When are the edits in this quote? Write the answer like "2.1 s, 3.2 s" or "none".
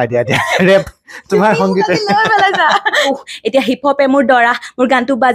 3.1 s